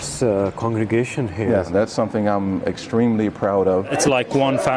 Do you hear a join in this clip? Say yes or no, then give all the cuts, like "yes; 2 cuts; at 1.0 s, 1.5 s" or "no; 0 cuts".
yes; 2 cuts; at 1.7 s, 3.9 s